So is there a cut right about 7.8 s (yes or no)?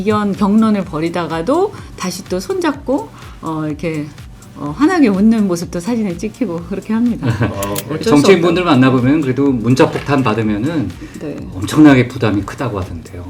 yes